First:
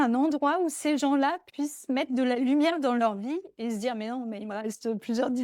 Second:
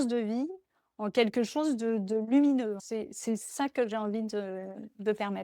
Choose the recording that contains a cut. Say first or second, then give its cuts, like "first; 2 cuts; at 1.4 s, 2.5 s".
second; 1 cut; at 2.8 s